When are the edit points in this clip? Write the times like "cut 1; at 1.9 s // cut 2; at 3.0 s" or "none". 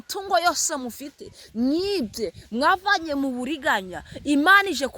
none